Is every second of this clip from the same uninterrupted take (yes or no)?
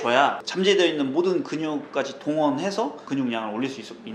no